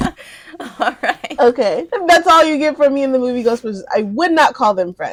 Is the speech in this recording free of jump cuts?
yes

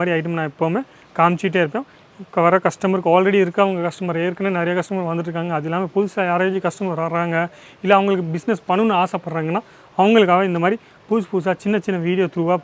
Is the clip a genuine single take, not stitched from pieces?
yes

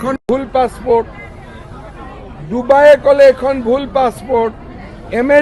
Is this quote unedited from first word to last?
yes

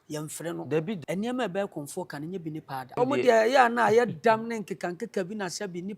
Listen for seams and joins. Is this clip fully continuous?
no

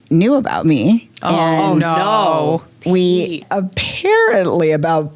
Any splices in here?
yes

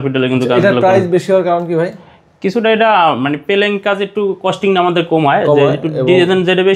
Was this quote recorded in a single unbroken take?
yes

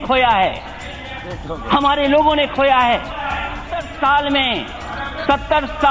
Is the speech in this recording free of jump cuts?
no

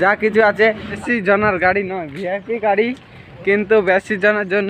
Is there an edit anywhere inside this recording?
yes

